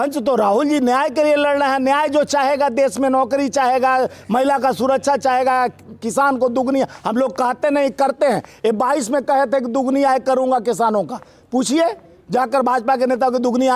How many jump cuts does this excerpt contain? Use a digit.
0